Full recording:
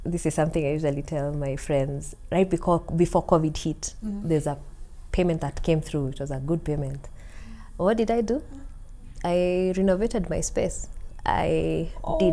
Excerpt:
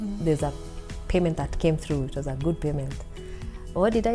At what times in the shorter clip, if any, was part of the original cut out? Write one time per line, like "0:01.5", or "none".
none

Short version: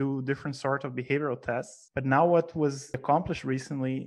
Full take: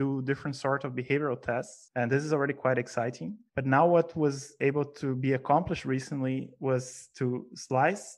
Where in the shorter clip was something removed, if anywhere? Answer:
0:01.8
0:03.0

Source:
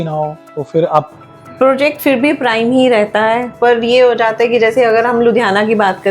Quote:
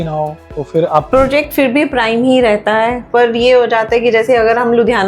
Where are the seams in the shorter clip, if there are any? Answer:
0:01.1

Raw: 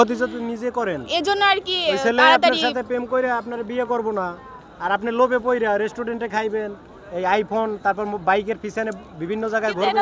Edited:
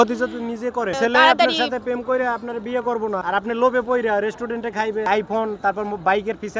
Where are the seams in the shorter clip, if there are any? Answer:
0:00.9
0:03.2
0:05.1

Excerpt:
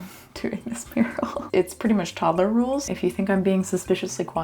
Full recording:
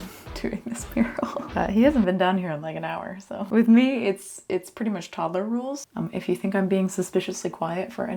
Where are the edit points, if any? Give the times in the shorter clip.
0:01.4
0:02.9

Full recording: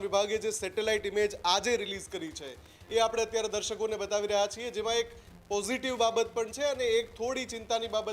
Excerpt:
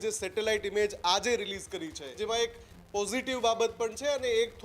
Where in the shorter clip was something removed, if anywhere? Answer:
0:02.1

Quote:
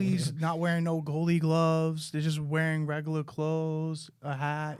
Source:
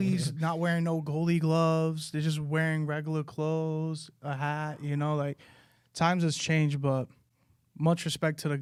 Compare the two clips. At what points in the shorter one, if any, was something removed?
none

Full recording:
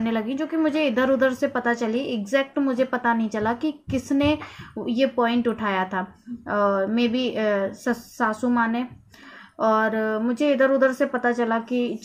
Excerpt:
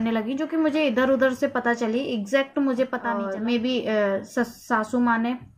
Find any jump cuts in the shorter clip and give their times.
0:03.3

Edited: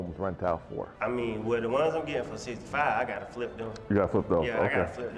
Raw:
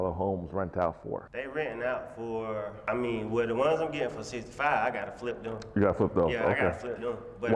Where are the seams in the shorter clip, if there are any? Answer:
0:00.9

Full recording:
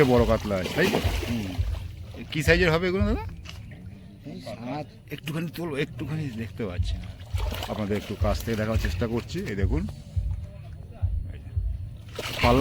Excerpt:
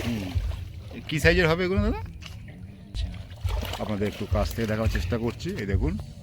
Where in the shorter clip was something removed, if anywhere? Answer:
0:03.0

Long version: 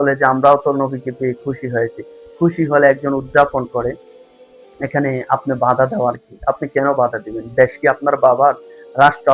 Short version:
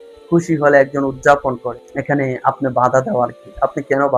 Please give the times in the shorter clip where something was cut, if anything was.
0:01.7

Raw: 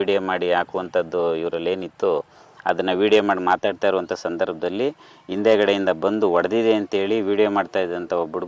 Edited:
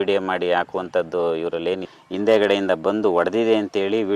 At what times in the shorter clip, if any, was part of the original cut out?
0:01.9

